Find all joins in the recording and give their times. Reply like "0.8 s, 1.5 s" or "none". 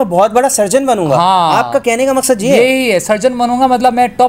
none